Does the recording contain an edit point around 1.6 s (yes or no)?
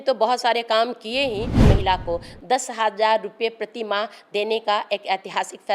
yes